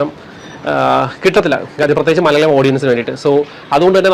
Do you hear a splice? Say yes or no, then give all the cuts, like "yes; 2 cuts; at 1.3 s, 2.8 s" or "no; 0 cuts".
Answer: no; 0 cuts